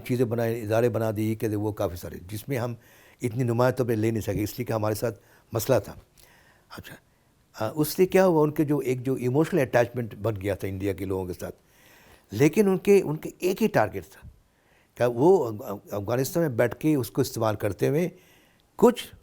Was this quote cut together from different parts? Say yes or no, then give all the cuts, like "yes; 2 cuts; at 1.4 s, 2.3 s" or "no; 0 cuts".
no; 0 cuts